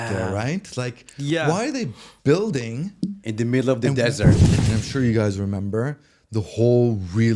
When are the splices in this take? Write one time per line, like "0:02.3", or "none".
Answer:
0:04.5